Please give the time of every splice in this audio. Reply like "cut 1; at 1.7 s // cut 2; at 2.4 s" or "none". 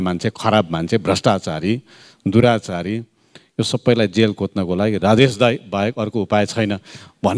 none